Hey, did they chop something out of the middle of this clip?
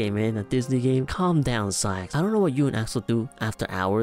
yes; 1 cut; at 2.0 s

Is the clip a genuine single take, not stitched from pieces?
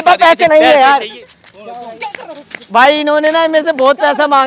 no; 1 cut; at 1.2 s

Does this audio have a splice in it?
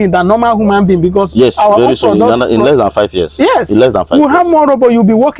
no; 0 cuts

